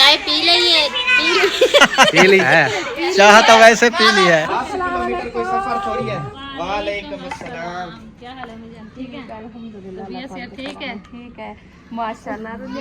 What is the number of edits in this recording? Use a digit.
3